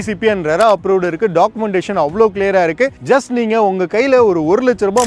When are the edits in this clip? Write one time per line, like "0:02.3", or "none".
none